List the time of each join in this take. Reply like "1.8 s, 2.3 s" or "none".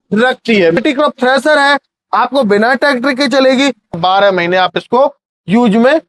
0.8 s, 3.9 s